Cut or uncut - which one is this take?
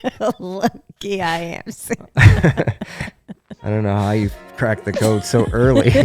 uncut